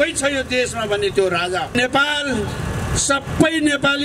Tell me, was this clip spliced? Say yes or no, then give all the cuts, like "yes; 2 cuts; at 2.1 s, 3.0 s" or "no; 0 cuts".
yes; 1 cut; at 1.7 s